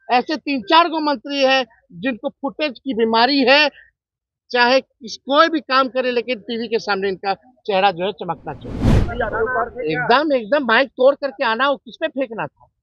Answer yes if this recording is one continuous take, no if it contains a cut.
no